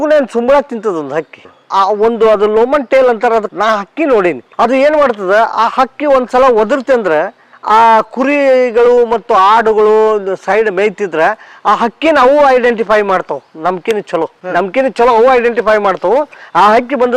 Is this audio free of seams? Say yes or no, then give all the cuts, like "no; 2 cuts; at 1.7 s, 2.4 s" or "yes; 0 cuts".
yes; 0 cuts